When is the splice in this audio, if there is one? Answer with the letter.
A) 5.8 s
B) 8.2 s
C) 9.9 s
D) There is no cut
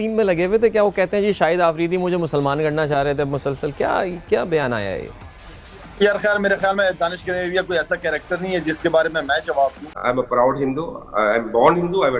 C